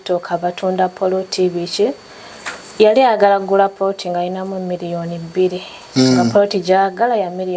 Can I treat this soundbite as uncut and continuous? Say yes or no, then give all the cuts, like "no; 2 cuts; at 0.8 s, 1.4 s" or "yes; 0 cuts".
yes; 0 cuts